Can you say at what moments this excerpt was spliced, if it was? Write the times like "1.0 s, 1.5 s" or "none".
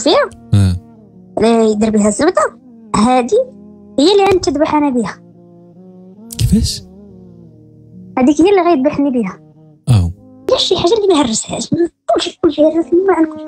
10.5 s